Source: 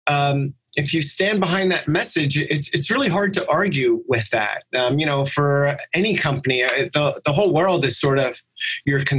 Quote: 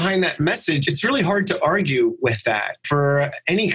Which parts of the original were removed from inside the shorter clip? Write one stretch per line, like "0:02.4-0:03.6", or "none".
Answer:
0:02.3-0:02.7
0:04.7-0:05.3